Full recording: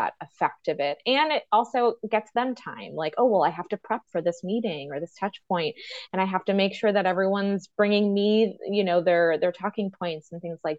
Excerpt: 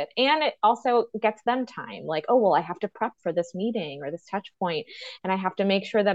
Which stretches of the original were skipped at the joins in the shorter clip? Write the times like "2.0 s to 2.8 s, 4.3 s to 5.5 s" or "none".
none